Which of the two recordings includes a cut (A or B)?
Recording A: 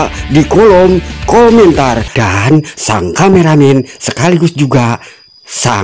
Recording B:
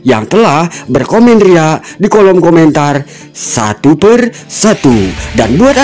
A